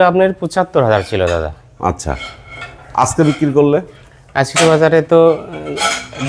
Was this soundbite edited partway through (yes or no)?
no